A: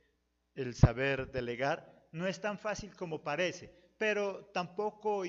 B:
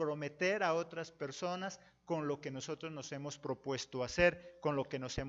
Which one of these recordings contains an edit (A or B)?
B